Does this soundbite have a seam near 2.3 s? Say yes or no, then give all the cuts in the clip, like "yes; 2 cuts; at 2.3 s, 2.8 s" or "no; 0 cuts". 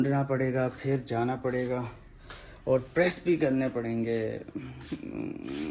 no; 0 cuts